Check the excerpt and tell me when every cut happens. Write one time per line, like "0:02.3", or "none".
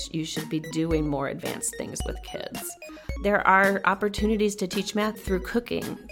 0:03.2
0:05.2

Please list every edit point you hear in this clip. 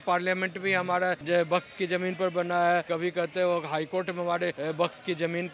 0:01.2
0:02.9
0:04.6

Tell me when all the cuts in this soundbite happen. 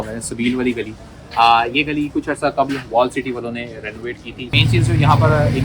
0:04.5

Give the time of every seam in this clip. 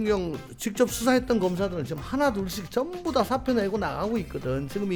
none

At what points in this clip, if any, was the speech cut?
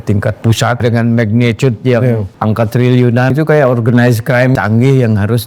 0:00.8
0:02.3
0:03.3
0:04.6

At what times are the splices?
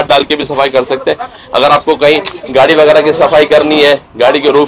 none

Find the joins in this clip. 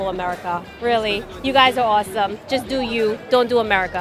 none

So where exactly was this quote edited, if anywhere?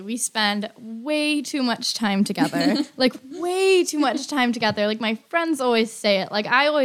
none

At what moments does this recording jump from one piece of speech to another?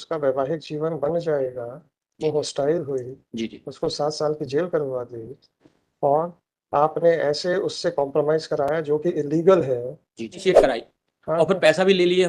0:10.4

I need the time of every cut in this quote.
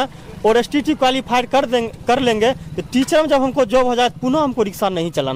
none

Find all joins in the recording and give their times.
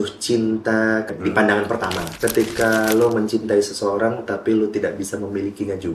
0:01.1
0:02.1

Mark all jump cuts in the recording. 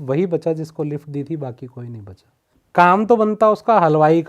0:02.5

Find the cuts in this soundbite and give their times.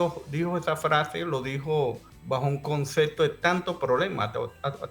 0:02.1

